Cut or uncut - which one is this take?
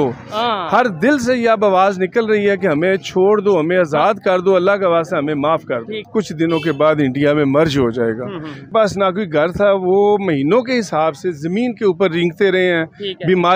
cut